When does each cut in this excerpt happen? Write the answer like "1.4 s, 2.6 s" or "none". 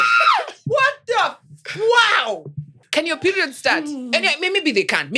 2.7 s